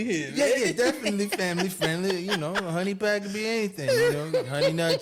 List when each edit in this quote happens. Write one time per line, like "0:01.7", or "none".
none